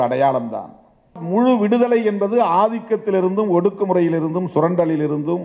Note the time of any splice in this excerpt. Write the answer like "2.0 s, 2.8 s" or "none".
1.2 s